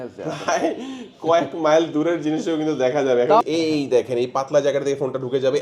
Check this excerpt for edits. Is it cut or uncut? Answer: cut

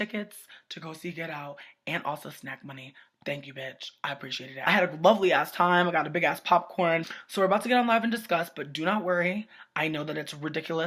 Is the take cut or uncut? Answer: uncut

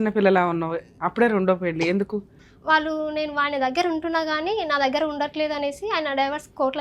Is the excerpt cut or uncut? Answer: cut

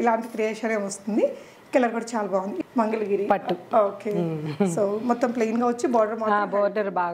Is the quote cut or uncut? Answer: cut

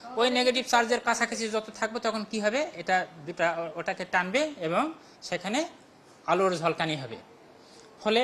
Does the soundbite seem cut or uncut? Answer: uncut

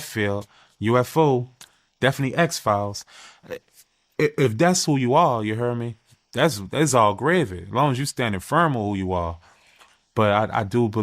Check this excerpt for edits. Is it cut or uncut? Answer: cut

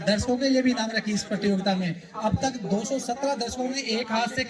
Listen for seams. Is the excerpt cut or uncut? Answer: uncut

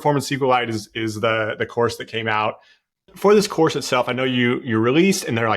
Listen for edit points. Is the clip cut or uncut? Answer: cut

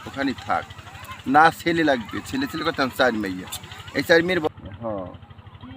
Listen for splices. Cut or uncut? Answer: cut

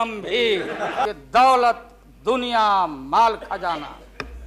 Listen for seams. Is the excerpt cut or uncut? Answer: cut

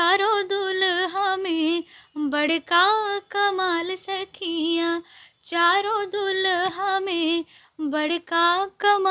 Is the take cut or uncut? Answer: uncut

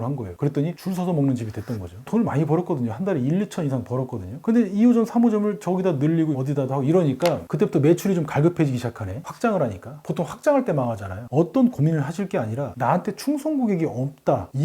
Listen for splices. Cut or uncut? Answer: cut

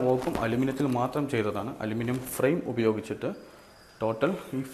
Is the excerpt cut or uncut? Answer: uncut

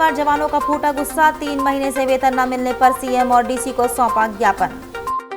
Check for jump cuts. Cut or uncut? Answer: uncut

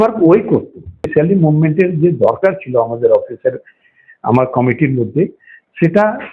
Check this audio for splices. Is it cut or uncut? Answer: cut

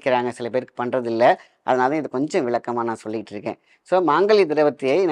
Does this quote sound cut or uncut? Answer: uncut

